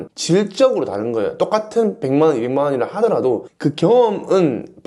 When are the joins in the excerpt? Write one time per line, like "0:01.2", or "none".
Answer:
0:03.5